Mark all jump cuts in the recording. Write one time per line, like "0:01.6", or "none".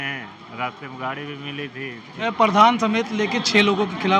0:02.2